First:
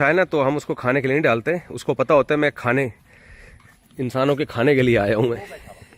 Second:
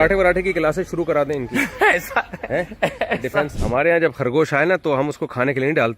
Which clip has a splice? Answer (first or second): second